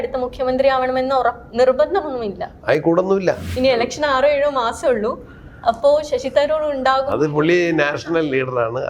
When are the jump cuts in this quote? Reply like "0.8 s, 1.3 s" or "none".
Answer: 3.5 s

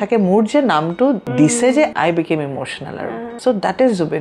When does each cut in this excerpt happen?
1.2 s, 1.9 s, 3.3 s

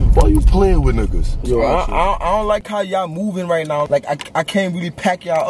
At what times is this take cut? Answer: 1.4 s, 3.9 s

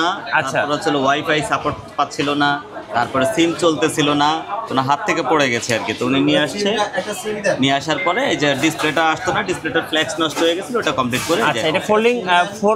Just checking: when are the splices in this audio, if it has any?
none

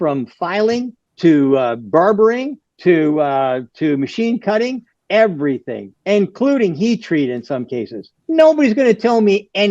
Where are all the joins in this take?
none

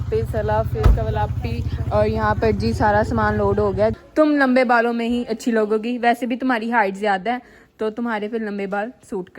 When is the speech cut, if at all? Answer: 3.9 s

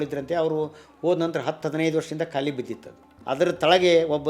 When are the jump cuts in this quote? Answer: 3.1 s

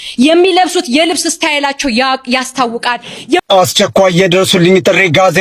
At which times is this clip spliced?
3.4 s

